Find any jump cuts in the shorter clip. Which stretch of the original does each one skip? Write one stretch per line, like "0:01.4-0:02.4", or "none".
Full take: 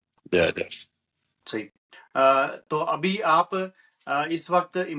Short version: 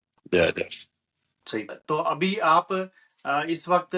0:01.8-0:02.6